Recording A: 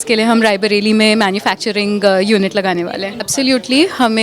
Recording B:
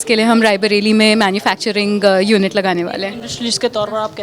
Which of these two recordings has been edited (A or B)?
A